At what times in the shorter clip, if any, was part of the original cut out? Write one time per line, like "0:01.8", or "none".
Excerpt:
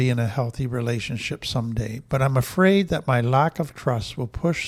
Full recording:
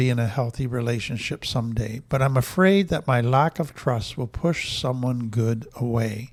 none